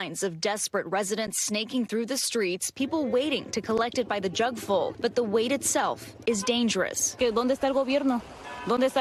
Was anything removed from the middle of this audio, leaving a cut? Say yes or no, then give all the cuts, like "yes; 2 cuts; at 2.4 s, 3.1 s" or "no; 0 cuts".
no; 0 cuts